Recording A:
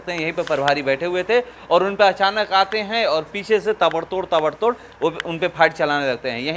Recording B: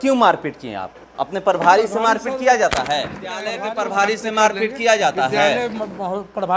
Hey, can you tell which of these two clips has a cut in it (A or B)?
B